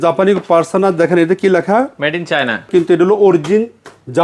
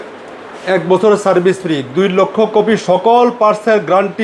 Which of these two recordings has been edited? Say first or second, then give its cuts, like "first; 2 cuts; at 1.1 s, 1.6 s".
first; 1 cut; at 2.7 s